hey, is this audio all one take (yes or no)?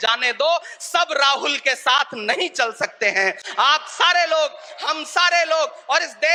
yes